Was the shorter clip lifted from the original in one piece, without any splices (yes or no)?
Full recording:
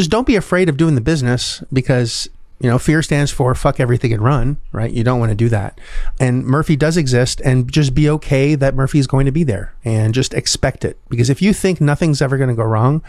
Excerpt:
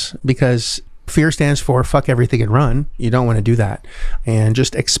no